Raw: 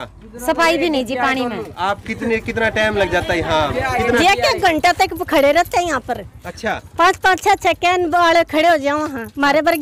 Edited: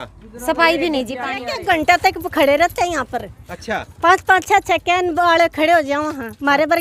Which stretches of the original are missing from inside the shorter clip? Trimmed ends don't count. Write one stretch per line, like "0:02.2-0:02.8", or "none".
0:01.5-0:04.5